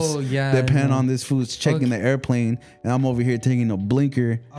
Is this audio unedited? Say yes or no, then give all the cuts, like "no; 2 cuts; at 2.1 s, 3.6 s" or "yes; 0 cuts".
yes; 0 cuts